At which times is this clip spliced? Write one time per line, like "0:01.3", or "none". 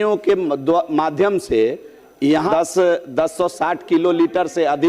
0:02.5